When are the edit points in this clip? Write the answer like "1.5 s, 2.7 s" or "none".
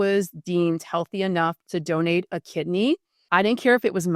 3.1 s